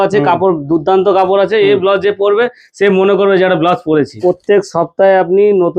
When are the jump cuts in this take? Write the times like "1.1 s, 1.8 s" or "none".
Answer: 4.1 s